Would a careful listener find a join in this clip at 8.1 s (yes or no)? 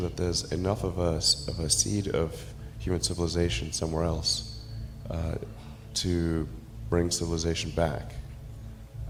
no